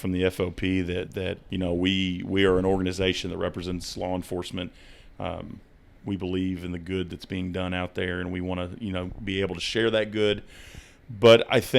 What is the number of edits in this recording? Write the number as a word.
one